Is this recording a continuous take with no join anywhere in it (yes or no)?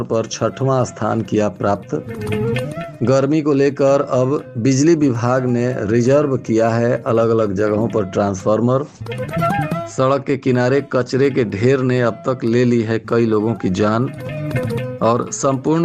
yes